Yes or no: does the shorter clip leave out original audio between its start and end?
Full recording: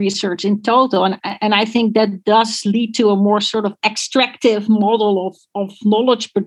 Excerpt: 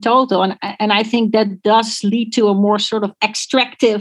no